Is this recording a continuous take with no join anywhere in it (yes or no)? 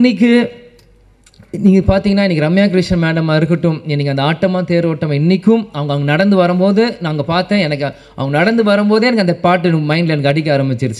yes